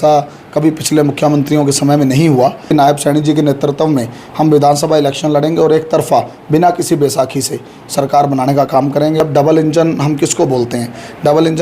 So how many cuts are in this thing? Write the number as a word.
two